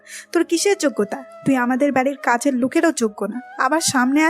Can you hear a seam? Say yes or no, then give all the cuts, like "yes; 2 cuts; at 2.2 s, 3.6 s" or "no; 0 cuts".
yes; 1 cut; at 1.2 s